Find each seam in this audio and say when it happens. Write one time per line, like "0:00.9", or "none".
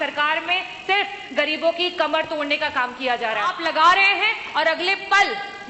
0:03.6